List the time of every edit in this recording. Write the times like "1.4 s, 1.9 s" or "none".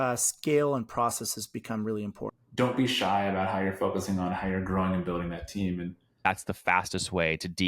2.4 s, 6.3 s